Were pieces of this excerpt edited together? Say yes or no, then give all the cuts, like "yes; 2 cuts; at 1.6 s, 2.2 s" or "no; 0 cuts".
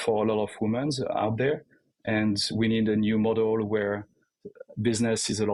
no; 0 cuts